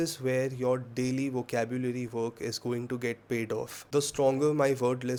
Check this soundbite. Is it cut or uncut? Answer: uncut